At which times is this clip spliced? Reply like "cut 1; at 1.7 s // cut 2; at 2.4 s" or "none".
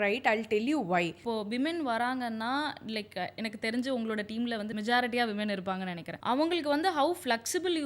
cut 1; at 1.2 s // cut 2; at 4.7 s // cut 3; at 6.0 s